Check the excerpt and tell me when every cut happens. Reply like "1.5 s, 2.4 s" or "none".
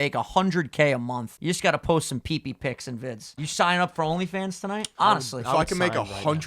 1.3 s, 3.4 s, 4.9 s